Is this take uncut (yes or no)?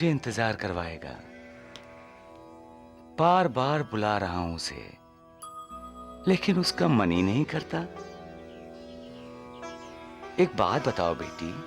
yes